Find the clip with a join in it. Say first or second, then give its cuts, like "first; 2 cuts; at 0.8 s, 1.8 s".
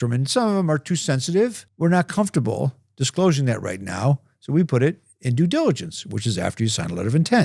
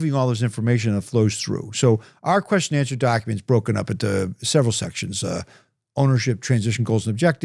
first; 1 cut; at 1.6 s